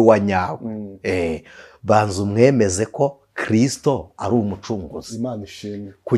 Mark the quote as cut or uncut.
uncut